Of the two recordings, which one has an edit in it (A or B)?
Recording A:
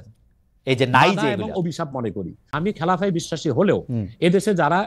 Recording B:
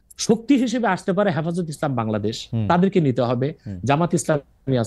A